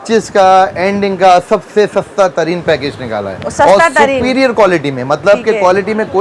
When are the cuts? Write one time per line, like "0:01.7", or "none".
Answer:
none